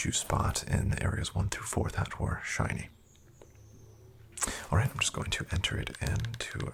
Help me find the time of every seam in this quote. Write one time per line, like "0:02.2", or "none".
none

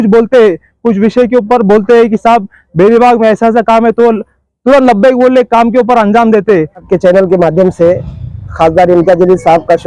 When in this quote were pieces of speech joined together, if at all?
0:06.9

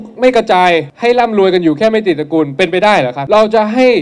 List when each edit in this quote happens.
0:00.9
0:03.2

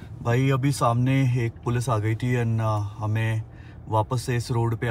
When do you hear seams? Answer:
none

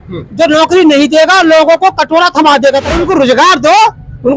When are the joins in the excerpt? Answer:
0:02.9

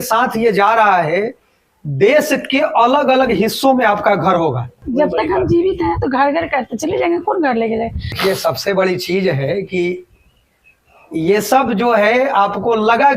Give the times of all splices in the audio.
0:04.9
0:08.1

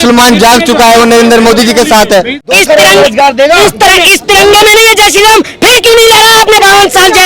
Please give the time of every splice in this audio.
0:02.4

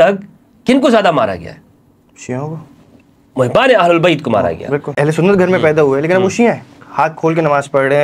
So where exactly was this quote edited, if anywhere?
0:04.9

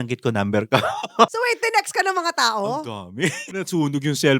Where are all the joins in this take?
0:01.3
0:03.5

